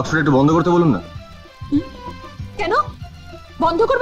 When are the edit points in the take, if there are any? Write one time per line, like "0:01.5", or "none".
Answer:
none